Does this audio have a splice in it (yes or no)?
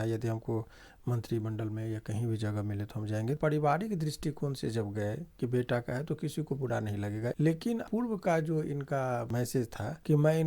yes